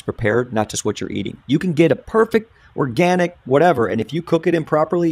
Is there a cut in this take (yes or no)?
no